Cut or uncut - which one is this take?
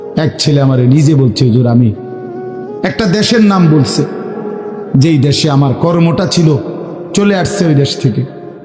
uncut